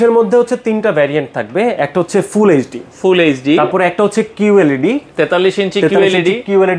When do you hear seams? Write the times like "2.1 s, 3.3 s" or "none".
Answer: none